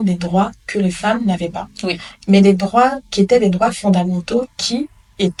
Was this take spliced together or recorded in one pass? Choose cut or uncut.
uncut